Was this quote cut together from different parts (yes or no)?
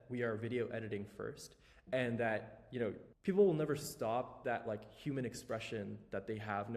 yes